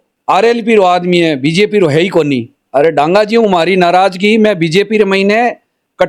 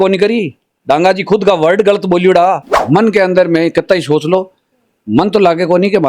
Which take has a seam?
second; 1 cut; at 2.8 s

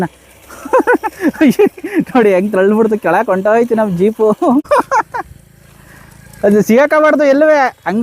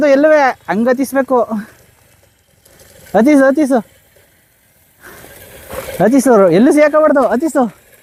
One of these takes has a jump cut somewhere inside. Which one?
first; 1 cut; at 4.7 s

